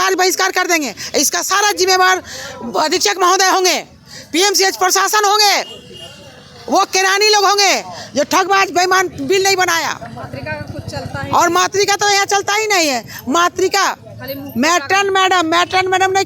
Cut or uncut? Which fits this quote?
uncut